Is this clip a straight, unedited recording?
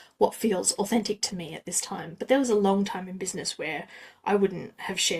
yes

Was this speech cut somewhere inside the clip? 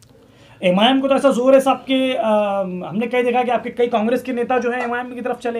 no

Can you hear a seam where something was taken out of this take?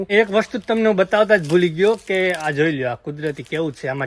no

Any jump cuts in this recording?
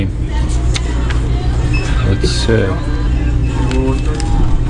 yes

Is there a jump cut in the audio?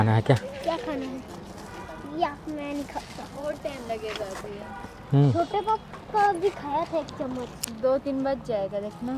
no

